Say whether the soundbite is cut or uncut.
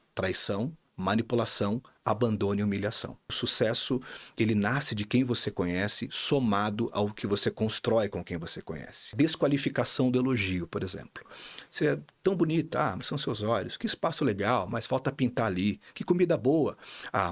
cut